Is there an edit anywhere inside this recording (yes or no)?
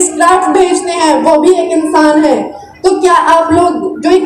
no